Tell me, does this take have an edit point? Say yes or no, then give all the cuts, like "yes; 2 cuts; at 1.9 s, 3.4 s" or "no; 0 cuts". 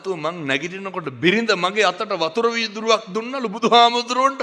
no; 0 cuts